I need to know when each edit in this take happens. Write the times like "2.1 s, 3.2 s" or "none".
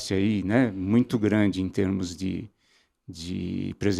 none